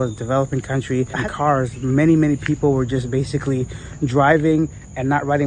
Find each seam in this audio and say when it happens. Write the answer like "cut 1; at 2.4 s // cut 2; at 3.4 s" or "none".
cut 1; at 1.2 s